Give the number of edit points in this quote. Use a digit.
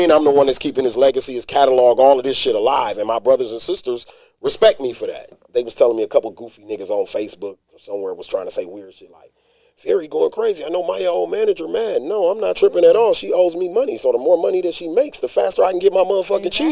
1